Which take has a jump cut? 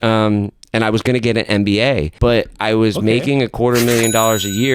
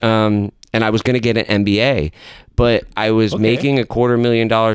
first; 1 cut; at 2.1 s

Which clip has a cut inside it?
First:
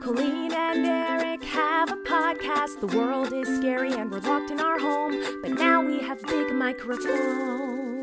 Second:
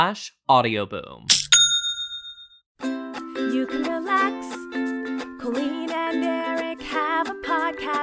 second; 1 cut; at 2.7 s

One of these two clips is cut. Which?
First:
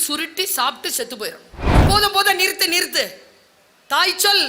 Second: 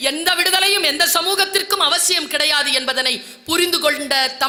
first; 1 cut; at 1.8 s

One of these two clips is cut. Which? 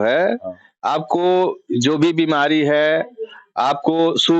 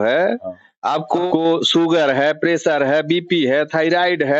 second; 1 cut; at 1.2 s

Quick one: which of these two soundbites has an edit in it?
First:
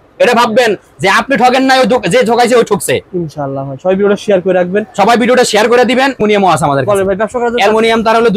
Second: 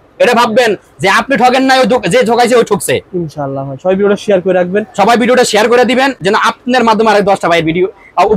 first; 1 cut; at 6.2 s

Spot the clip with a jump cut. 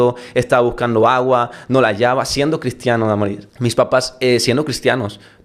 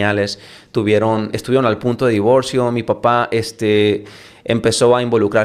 first; 1 cut; at 3.5 s

